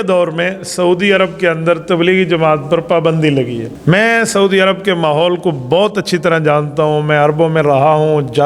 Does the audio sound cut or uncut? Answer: cut